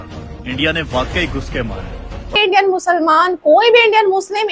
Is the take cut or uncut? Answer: cut